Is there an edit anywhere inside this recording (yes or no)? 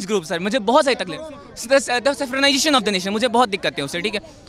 no